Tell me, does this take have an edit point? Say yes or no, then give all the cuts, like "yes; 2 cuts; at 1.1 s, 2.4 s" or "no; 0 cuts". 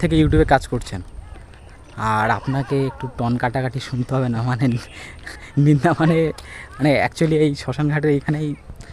no; 0 cuts